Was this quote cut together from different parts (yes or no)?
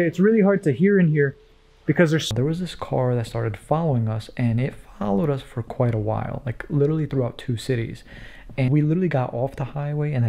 yes